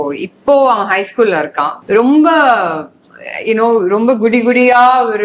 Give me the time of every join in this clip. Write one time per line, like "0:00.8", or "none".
0:01.7